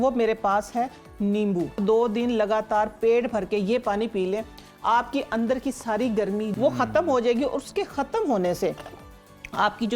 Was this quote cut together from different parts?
yes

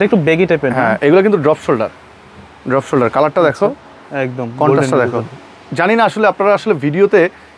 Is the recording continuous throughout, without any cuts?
yes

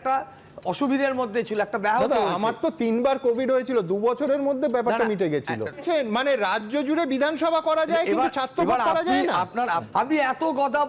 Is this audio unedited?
no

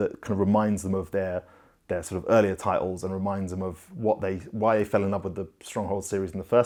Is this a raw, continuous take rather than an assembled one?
yes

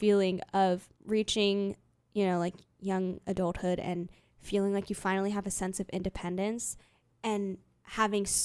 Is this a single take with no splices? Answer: no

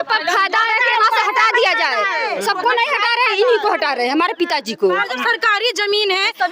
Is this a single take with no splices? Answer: no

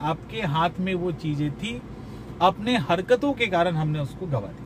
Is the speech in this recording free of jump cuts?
yes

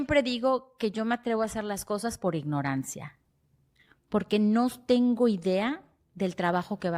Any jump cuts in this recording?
no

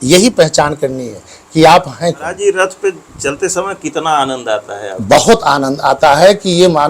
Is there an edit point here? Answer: yes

